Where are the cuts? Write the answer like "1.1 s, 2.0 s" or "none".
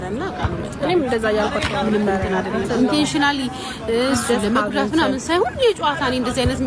none